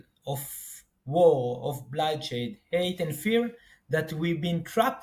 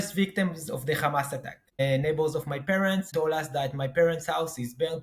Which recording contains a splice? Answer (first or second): second